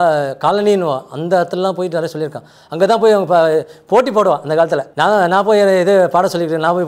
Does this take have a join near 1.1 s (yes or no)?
no